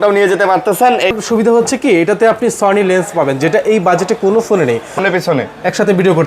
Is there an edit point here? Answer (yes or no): yes